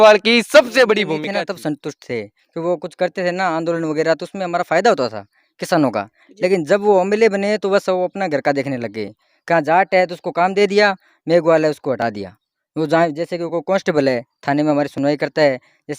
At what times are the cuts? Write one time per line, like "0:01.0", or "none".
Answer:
0:01.2